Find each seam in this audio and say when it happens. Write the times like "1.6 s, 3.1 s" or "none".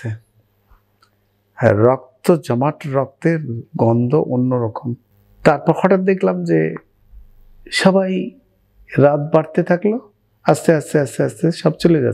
none